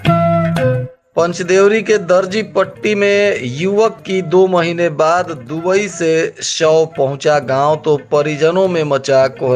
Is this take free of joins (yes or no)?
no